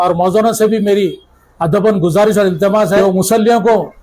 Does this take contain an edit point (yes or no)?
yes